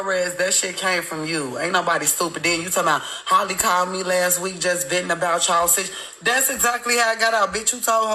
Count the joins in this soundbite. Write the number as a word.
zero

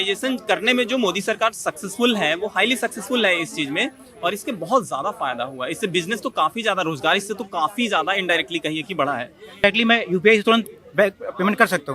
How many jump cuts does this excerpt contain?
one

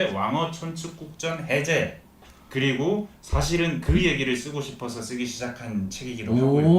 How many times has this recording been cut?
one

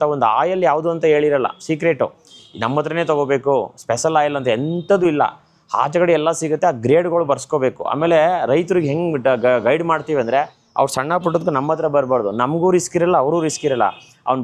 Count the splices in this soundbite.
zero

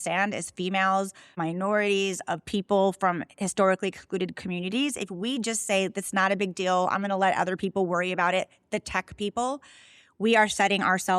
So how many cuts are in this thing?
one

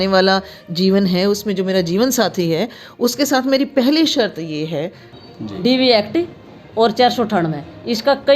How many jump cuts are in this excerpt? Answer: one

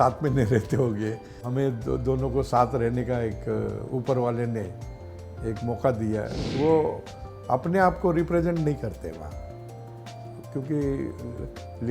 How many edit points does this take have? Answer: two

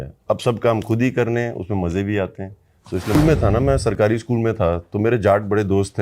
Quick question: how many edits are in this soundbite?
one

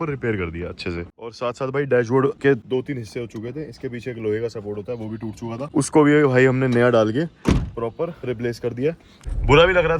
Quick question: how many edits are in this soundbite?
four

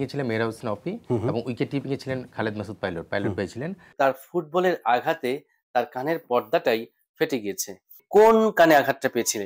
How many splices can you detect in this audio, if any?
one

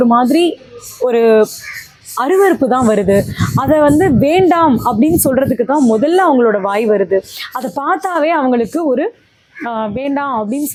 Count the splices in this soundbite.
zero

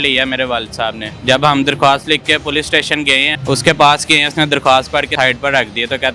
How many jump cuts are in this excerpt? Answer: three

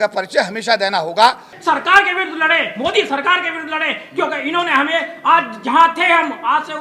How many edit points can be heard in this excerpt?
one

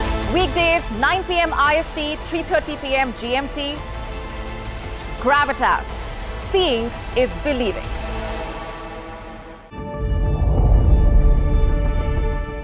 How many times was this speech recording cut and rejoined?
one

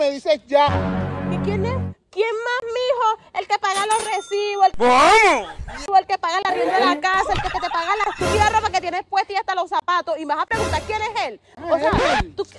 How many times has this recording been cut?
zero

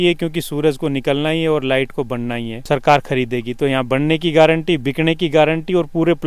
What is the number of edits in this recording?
one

